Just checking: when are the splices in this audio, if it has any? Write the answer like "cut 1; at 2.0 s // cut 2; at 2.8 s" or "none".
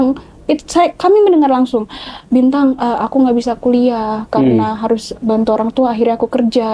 none